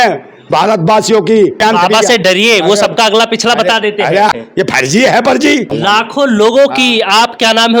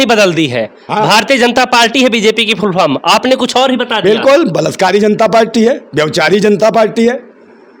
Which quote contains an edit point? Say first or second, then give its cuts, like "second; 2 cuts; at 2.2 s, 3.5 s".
first; 3 cuts; at 1.6 s, 4.3 s, 5.7 s